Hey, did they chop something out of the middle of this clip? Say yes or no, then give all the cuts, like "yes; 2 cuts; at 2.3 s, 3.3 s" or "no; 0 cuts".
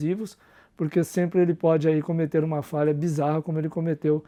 no; 0 cuts